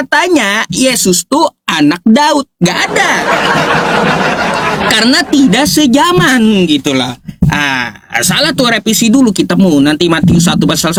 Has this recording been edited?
no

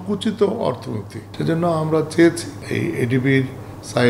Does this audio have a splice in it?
yes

